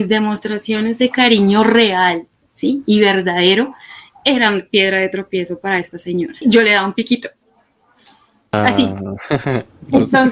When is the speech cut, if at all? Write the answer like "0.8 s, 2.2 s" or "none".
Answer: 6.4 s